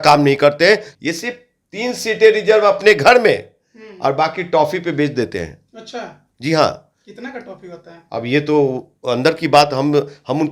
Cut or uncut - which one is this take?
cut